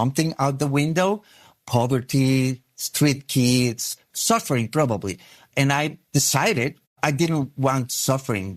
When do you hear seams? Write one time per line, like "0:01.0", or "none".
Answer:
0:04.1
0:06.0